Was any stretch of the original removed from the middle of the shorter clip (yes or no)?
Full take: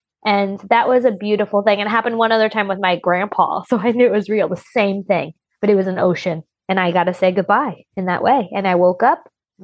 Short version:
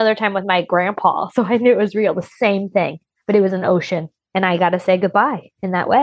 no